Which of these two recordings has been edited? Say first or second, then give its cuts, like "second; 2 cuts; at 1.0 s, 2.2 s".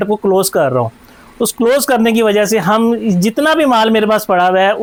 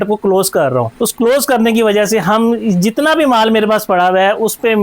second; 1 cut; at 0.9 s